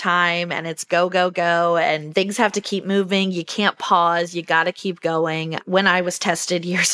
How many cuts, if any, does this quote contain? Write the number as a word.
one